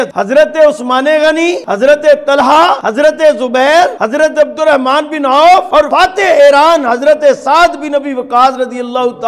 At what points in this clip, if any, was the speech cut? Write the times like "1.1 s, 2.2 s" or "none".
1.6 s, 2.8 s, 4.0 s, 5.8 s